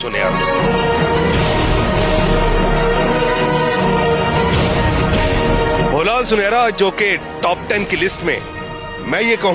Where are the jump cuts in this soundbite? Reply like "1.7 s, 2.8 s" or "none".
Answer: none